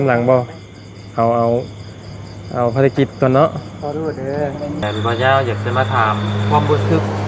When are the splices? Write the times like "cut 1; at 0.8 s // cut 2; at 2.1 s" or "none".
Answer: cut 1; at 4.8 s